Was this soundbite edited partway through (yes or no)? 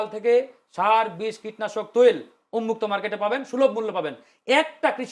no